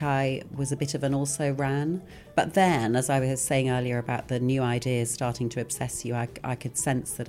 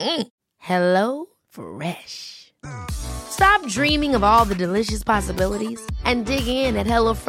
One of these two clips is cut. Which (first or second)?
first